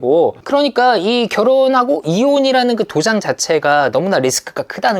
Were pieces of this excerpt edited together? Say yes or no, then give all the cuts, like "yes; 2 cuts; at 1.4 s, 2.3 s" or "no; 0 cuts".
no; 0 cuts